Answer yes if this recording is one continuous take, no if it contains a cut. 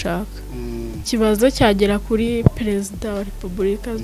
no